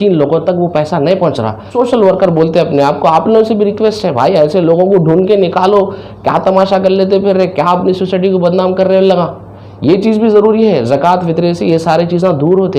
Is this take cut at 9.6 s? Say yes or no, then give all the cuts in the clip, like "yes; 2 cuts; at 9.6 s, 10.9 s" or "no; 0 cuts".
no; 1 cut; at 1.7 s